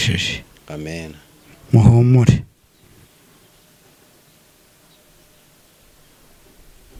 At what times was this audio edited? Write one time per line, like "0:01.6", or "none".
none